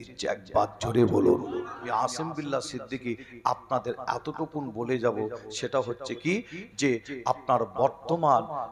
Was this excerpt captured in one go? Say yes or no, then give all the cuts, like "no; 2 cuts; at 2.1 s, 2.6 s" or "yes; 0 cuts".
no; 1 cut; at 1.9 s